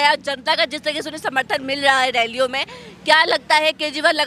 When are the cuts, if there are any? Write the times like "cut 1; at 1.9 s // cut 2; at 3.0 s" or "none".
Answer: none